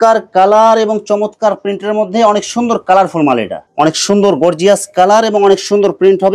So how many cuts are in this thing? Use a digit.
1